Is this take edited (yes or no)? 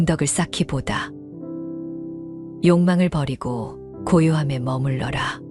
no